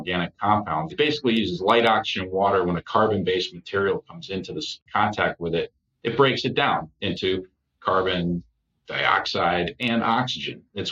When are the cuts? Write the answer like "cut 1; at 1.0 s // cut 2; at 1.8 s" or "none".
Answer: cut 1; at 0.9 s // cut 2; at 4.8 s